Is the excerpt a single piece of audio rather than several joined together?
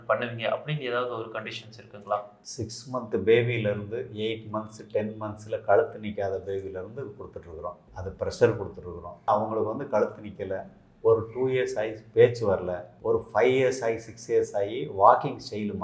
yes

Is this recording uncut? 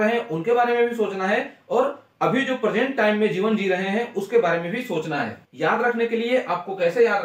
no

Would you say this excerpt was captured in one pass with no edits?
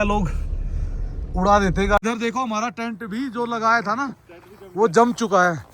no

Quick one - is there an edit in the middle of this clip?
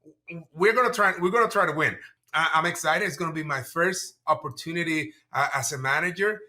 yes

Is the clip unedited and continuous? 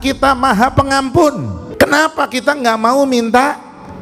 no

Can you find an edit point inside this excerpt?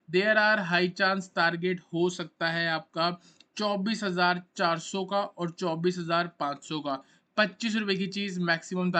no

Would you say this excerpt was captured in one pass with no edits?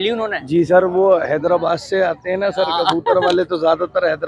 yes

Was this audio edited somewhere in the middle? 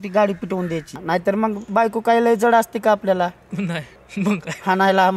yes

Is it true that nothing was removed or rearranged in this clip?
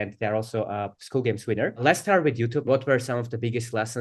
no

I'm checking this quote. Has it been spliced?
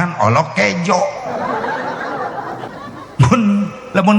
yes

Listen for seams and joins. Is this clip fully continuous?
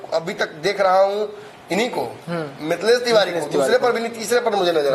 yes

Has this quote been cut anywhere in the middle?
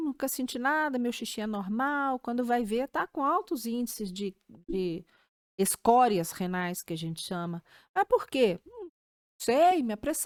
no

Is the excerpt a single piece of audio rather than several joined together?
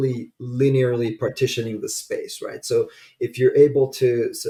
yes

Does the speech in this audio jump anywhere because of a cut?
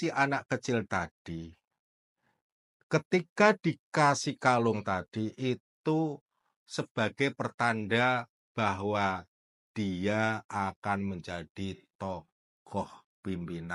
no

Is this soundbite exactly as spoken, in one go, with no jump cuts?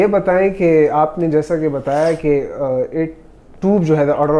yes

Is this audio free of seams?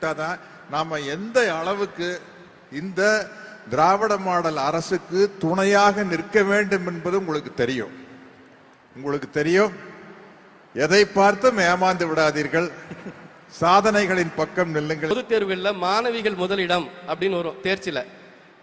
no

